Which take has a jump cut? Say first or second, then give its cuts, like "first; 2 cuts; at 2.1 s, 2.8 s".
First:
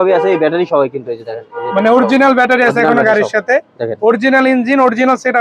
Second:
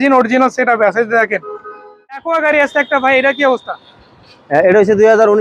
second; 1 cut; at 2.2 s